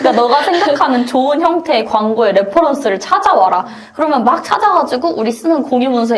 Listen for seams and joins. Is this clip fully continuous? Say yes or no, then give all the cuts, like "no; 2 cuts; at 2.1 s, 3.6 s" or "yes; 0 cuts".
yes; 0 cuts